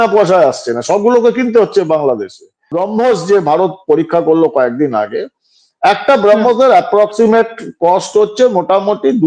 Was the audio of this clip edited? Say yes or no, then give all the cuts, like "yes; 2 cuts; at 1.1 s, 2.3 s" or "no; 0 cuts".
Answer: yes; 1 cut; at 2.7 s